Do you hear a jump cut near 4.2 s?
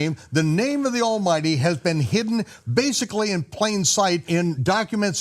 yes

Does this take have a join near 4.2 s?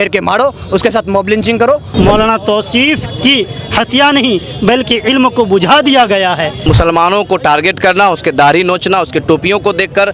no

